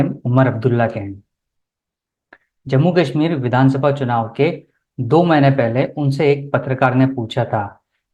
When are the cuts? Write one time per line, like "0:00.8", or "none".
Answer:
none